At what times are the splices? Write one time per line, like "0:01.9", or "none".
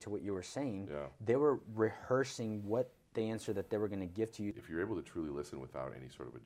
0:04.6